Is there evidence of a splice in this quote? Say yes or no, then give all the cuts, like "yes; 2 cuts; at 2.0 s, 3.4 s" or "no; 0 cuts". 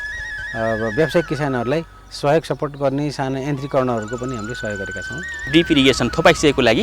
yes; 1 cut; at 5.5 s